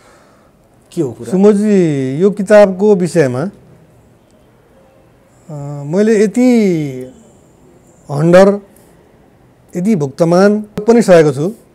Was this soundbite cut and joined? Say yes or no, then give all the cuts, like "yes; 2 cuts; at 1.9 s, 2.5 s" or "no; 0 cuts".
yes; 1 cut; at 10.8 s